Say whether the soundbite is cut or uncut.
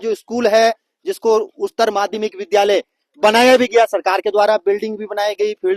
uncut